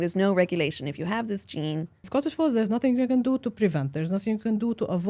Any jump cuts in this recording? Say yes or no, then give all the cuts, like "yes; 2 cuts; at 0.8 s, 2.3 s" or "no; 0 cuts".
yes; 1 cut; at 2.1 s